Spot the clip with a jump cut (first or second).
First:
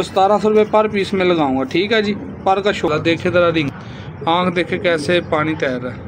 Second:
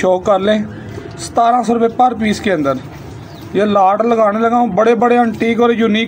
first